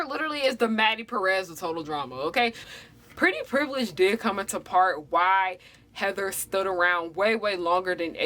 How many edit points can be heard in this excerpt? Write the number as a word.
one